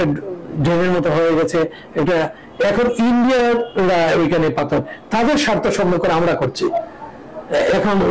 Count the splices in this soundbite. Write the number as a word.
zero